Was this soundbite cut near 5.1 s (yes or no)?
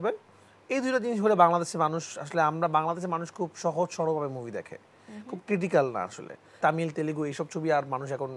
no